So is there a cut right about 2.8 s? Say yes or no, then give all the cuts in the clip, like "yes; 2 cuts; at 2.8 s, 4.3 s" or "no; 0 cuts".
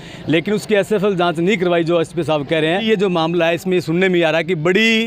yes; 1 cut; at 2.8 s